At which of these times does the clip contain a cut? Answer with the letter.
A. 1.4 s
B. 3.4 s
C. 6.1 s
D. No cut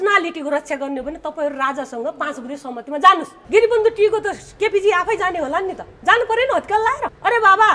B